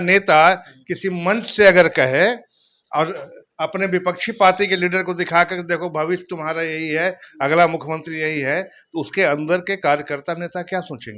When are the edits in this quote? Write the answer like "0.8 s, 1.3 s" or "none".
none